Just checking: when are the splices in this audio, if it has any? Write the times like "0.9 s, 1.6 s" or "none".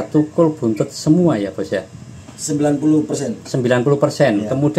none